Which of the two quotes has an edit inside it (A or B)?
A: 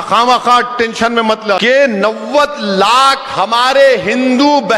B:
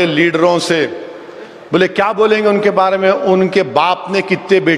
A